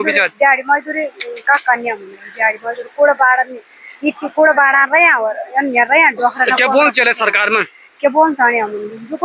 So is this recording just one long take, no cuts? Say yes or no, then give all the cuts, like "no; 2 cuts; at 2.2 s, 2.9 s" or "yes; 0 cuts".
yes; 0 cuts